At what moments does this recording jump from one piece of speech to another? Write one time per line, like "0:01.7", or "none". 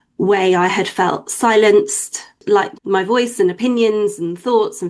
0:02.4